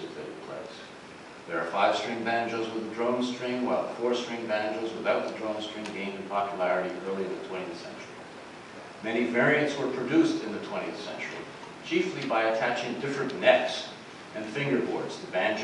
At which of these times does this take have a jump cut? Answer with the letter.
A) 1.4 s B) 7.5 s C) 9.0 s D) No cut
B